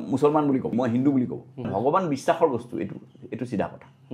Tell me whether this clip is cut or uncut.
cut